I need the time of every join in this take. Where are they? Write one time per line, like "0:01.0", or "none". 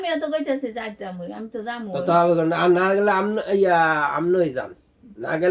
none